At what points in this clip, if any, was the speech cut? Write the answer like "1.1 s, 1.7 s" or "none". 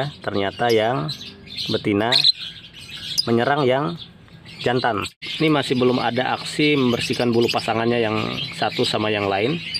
5.2 s